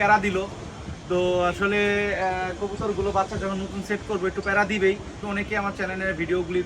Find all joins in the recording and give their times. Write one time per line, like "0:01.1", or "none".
0:05.1